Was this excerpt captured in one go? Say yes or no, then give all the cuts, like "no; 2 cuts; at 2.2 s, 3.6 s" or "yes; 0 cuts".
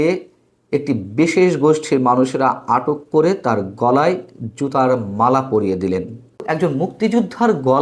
no; 1 cut; at 6.5 s